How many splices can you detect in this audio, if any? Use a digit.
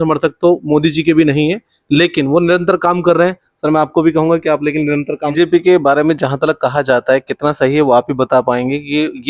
1